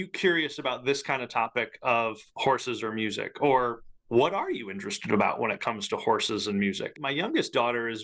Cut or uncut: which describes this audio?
cut